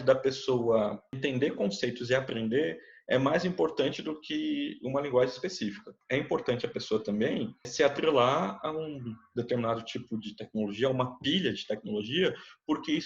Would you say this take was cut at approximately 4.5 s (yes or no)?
no